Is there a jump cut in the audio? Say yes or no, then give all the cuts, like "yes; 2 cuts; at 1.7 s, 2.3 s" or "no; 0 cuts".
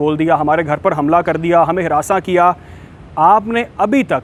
no; 0 cuts